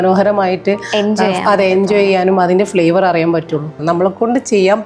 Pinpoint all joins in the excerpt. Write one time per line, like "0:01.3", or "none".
0:03.8

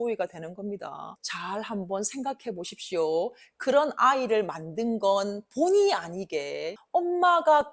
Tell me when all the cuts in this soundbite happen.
0:01.3
0:06.7

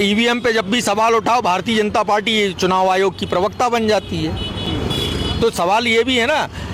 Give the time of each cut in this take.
none

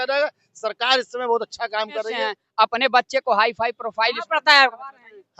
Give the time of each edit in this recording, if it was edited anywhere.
0:02.1

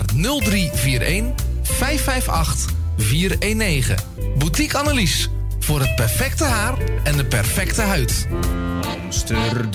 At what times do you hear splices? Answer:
0:08.3

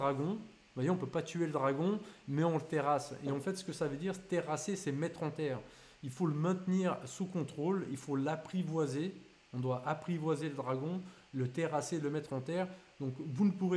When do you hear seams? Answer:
none

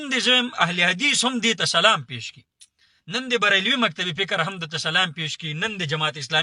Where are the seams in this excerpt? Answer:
none

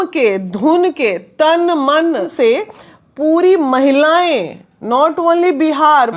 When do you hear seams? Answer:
0:02.3

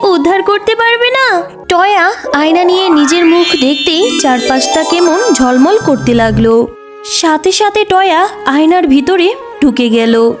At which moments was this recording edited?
0:01.5

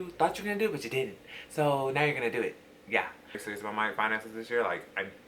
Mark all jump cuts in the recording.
0:03.3

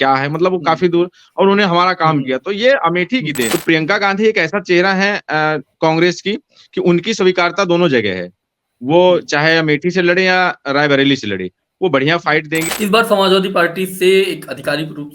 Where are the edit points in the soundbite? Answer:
0:03.5
0:12.6

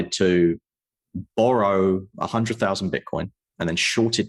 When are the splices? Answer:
0:02.1

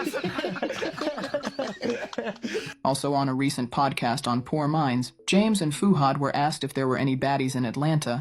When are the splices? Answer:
0:04.0

